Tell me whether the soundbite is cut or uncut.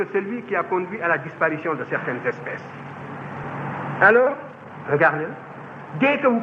cut